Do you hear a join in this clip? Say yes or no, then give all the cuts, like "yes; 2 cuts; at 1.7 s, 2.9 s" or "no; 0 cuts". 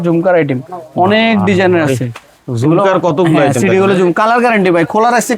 no; 0 cuts